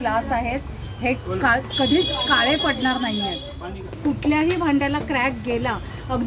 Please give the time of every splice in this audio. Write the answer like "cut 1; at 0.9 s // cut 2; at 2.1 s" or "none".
cut 1; at 4.0 s